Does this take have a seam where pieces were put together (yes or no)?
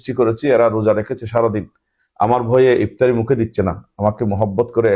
no